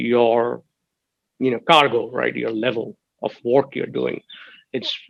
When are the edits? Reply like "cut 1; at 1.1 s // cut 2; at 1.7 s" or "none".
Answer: none